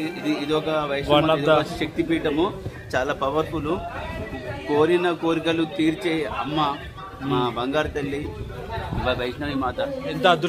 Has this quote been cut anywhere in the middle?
no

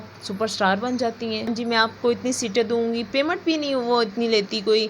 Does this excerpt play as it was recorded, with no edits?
no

